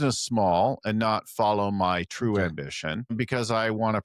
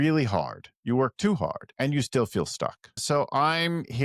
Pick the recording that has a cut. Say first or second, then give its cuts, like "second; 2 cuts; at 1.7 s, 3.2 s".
second; 2 cuts; at 1.6 s, 3.0 s